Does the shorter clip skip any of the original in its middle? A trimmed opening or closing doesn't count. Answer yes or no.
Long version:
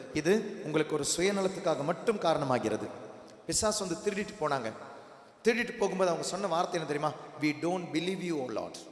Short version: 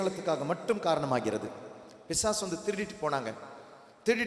no